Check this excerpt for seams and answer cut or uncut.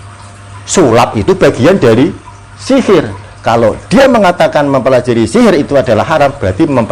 uncut